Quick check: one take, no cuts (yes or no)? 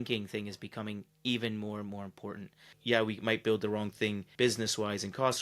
no